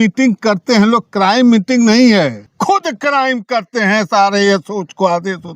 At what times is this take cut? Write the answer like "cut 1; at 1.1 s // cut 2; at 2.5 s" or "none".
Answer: cut 1; at 2.4 s

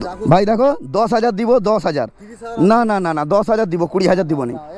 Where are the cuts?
none

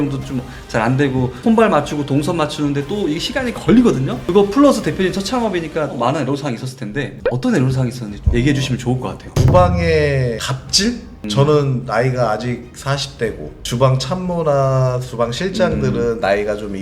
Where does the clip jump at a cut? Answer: none

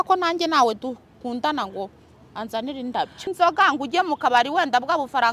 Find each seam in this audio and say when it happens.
cut 1; at 3.3 s

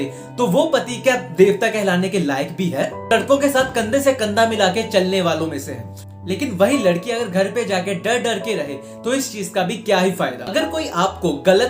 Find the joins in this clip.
cut 1; at 3.1 s // cut 2; at 10.4 s

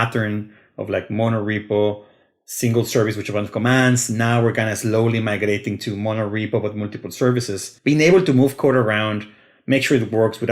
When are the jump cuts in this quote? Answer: cut 1; at 7.6 s

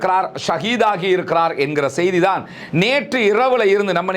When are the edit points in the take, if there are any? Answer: none

